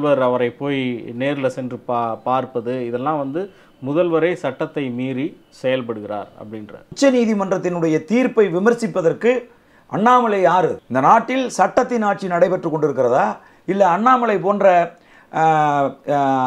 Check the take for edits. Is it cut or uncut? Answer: cut